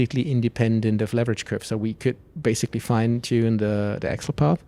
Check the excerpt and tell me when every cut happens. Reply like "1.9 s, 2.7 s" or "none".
none